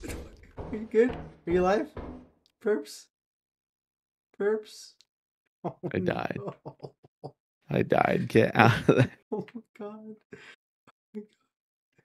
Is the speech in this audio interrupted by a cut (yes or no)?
no